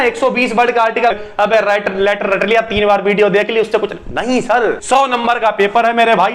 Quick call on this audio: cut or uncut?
cut